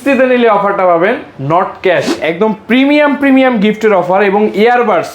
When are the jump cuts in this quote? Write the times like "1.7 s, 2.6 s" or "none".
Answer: 2.1 s